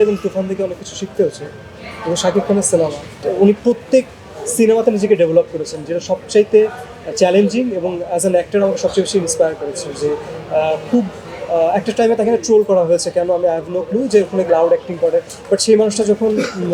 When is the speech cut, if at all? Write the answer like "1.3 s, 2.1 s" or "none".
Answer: 3.1 s